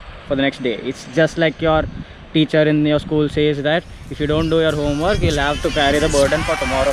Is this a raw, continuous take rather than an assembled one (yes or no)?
yes